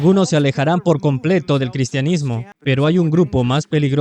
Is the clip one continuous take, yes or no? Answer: no